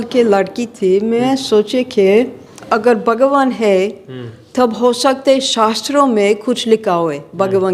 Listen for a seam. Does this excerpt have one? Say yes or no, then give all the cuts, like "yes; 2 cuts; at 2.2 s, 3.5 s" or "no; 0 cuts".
yes; 1 cut; at 2.6 s